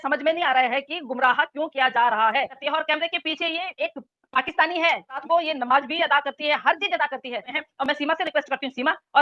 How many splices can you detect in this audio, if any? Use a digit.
3